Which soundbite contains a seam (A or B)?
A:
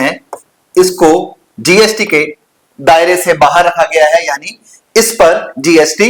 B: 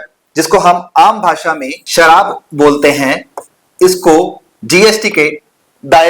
B